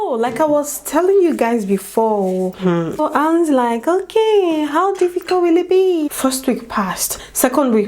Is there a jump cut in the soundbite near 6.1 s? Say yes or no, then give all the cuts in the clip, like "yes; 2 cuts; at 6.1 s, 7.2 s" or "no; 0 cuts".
yes; 2 cuts; at 3.0 s, 6.1 s